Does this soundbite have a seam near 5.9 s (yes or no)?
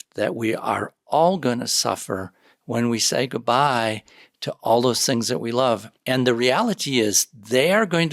yes